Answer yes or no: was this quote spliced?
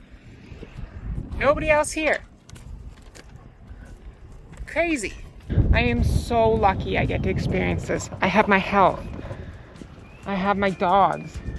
yes